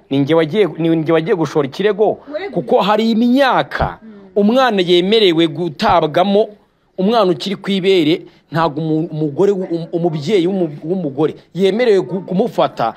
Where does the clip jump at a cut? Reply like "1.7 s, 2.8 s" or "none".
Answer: none